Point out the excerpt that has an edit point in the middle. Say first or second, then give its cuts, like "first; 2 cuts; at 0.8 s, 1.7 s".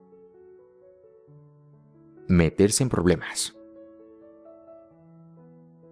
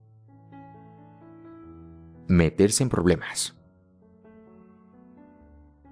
first; 1 cut; at 4.1 s